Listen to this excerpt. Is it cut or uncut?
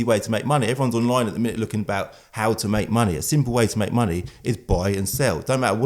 uncut